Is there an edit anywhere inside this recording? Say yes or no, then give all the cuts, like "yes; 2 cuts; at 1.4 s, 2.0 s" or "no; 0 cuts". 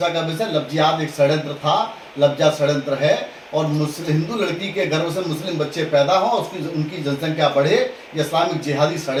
no; 0 cuts